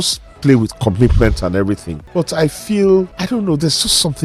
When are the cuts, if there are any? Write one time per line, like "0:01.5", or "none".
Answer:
0:03.2